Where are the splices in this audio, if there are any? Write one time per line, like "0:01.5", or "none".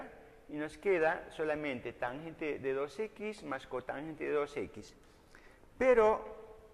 0:01.8